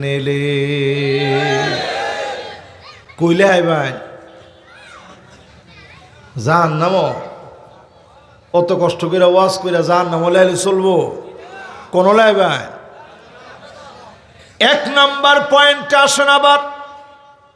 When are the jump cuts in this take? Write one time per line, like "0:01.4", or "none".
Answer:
none